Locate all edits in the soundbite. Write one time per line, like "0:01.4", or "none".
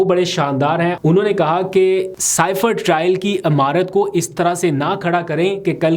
0:01.0
0:02.2